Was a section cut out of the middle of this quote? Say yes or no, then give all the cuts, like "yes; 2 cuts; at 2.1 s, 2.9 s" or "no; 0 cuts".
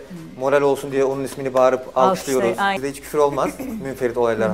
yes; 1 cut; at 2.8 s